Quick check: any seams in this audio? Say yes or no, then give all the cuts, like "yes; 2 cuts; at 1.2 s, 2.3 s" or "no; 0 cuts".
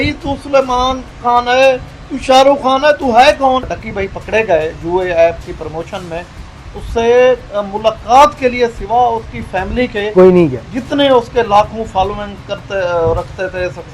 yes; 1 cut; at 3.7 s